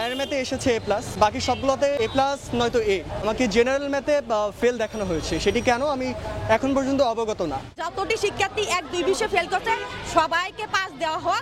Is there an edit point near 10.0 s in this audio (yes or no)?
no